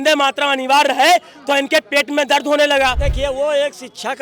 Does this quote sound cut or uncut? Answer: cut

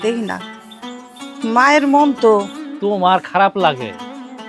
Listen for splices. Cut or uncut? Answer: cut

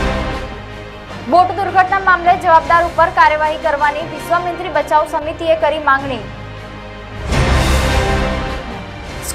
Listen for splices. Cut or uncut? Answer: cut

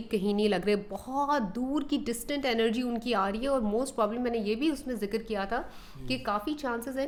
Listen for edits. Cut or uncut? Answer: uncut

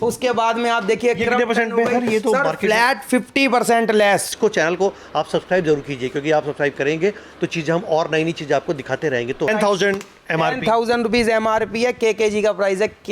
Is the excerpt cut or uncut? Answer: cut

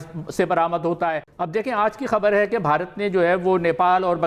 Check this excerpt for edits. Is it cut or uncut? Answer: cut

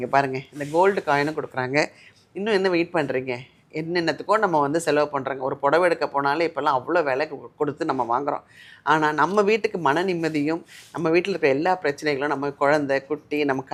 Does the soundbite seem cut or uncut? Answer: uncut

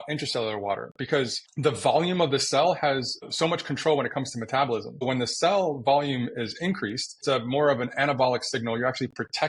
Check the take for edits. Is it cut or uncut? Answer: cut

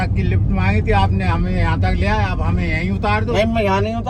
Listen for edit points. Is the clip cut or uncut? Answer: uncut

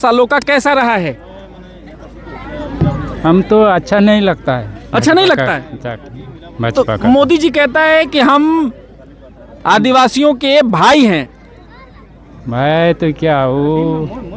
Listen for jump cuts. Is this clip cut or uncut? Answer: uncut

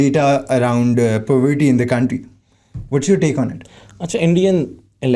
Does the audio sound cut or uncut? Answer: uncut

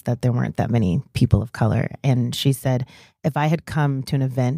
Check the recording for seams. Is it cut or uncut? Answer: uncut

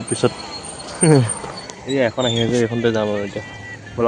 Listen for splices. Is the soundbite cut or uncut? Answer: uncut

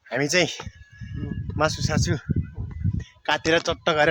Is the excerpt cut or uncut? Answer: uncut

